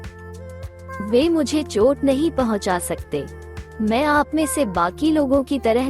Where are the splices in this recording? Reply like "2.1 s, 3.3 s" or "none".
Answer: 1.0 s